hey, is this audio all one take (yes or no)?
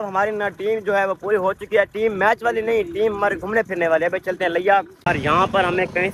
no